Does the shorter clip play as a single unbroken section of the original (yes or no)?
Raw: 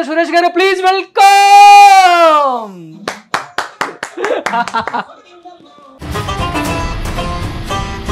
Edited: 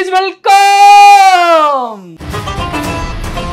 no